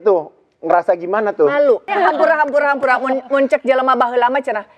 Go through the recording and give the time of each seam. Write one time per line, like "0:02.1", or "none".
0:01.9